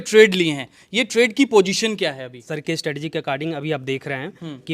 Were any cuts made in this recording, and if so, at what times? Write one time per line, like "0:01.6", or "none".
0:02.5